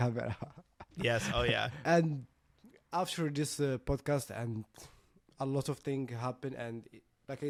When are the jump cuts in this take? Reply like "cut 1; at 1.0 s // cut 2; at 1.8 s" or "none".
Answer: none